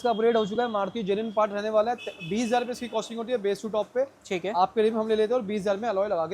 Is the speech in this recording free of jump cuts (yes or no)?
yes